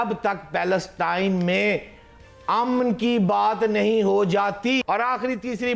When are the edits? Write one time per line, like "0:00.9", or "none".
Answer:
none